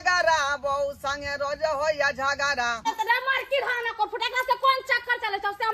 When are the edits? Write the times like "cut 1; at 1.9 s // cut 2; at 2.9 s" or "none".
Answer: cut 1; at 2.9 s